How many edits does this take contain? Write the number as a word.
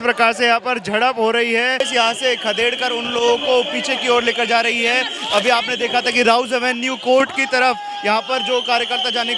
one